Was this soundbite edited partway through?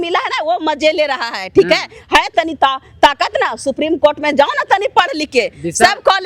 no; 0 cuts

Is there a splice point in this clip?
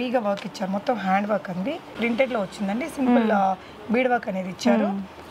yes; 1 cut; at 1.9 s

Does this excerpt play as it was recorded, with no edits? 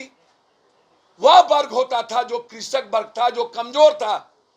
yes; 0 cuts

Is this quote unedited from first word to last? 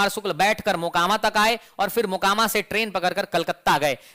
yes; 0 cuts

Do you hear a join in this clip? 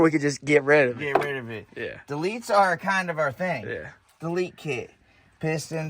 no; 0 cuts

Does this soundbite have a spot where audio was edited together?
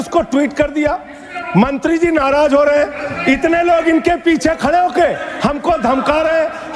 no; 0 cuts

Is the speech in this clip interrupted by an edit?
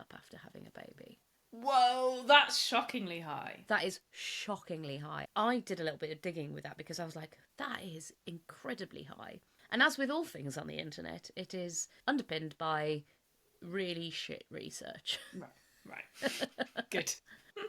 yes; 2 cuts; at 1.3 s, 5.3 s

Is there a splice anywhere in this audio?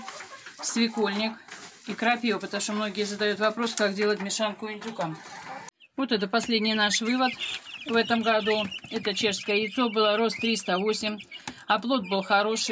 yes; 1 cut; at 5.7 s

